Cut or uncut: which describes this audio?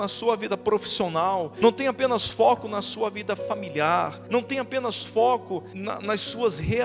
cut